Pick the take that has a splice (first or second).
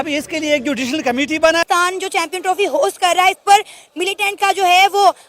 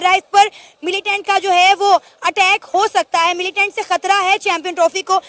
first